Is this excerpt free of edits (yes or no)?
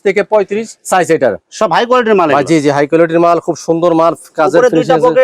no